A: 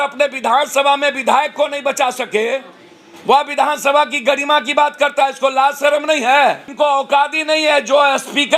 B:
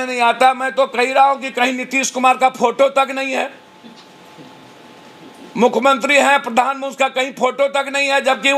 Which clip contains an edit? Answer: A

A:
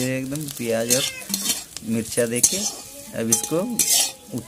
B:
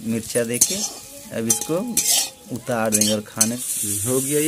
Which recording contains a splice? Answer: B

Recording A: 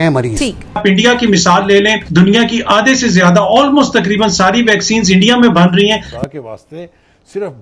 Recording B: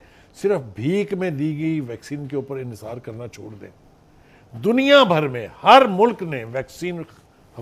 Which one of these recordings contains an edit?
A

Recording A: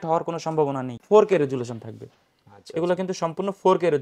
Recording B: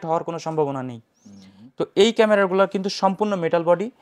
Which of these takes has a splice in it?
A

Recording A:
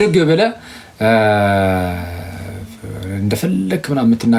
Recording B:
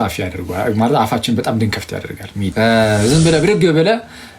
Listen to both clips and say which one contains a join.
B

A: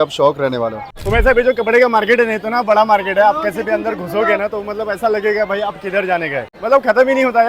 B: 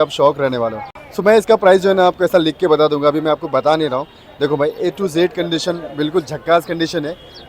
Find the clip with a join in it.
A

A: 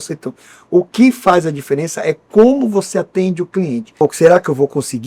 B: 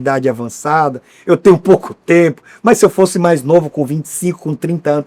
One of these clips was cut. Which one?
A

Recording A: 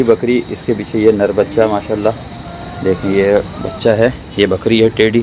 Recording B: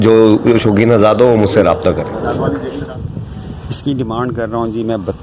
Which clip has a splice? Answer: B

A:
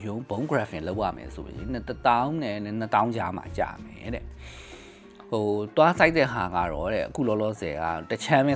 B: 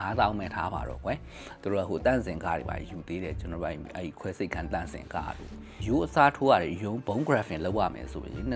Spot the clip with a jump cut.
B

